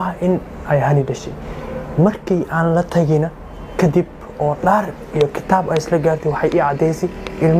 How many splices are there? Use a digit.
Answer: 1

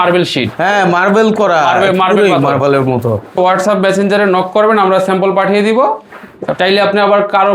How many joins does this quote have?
1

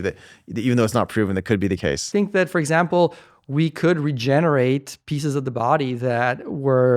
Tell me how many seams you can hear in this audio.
1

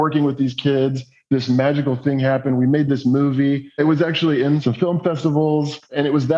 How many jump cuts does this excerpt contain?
2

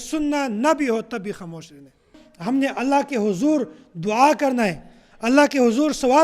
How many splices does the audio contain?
1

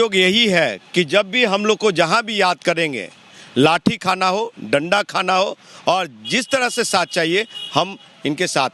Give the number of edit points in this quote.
0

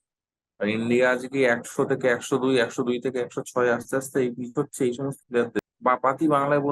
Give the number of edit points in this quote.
1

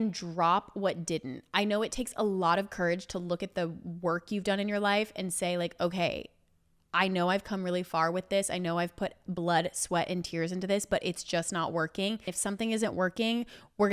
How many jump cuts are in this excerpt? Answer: 1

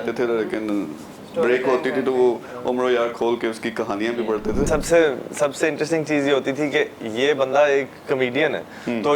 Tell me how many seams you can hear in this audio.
1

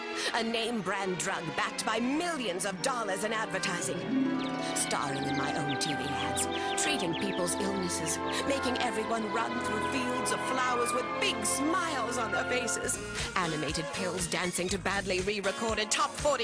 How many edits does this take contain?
1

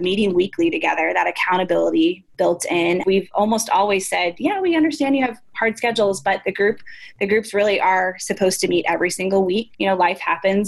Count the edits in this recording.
2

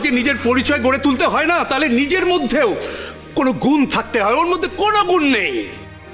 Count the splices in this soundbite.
0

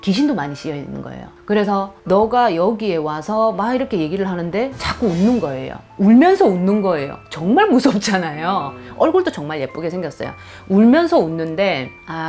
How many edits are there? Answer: 0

